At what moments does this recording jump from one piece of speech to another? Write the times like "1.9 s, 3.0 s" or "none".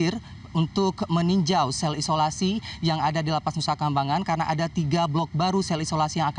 3.0 s